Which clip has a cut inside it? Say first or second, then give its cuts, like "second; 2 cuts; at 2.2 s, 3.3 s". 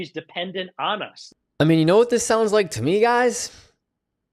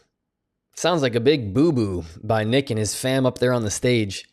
first; 1 cut; at 1.2 s